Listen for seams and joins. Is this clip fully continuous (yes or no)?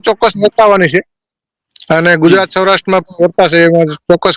yes